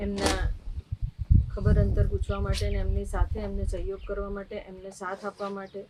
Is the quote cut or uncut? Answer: uncut